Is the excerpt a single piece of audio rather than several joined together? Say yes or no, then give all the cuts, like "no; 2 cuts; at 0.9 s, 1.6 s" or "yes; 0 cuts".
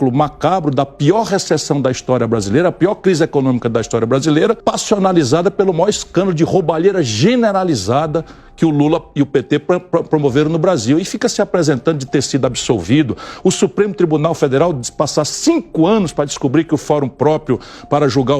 no; 1 cut; at 4.6 s